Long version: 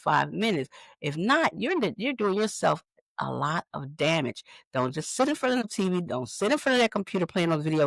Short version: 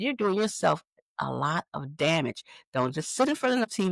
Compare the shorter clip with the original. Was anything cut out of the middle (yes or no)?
no